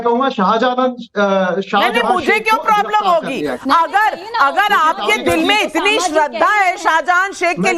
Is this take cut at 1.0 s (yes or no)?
no